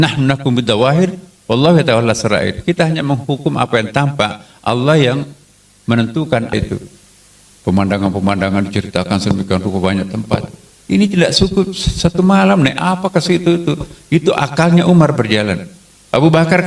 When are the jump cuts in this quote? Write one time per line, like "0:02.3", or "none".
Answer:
0:06.5